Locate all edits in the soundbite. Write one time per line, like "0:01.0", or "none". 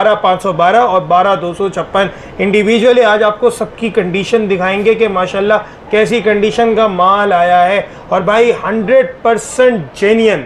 none